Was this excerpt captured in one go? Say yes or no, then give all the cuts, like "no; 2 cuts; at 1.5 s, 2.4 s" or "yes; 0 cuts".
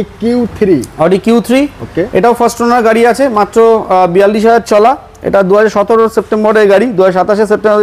yes; 0 cuts